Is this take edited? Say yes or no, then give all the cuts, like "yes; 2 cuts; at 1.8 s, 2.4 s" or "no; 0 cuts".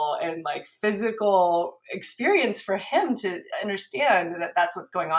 no; 0 cuts